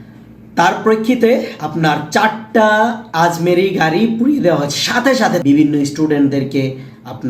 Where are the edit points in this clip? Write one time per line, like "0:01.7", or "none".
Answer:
0:05.4